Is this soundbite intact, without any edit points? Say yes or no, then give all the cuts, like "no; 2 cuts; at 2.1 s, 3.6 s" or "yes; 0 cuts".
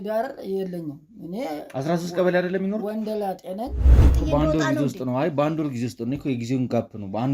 no; 1 cut; at 4.1 s